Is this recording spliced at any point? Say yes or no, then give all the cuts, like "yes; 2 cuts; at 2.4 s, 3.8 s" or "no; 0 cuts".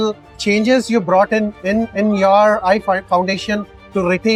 no; 0 cuts